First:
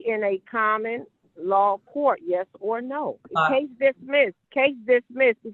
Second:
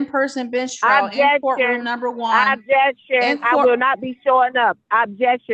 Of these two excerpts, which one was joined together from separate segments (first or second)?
first